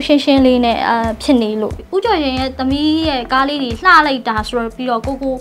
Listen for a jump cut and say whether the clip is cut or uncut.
cut